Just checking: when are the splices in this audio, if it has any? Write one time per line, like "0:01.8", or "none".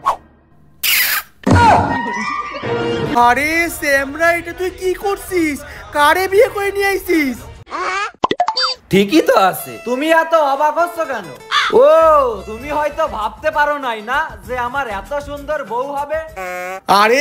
0:03.2

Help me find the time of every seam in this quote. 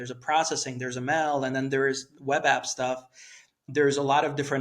0:03.6

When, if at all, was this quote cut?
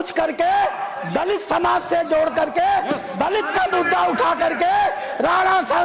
none

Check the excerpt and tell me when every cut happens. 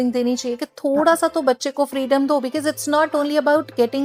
none

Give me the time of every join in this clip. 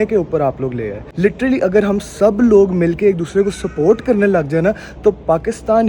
0:01.0

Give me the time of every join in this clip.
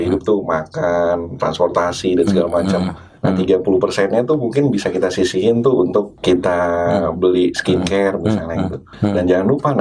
0:03.1
0:06.1
0:08.9

